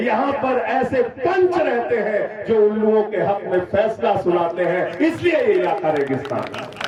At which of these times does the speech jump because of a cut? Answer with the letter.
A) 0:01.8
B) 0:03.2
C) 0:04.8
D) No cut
D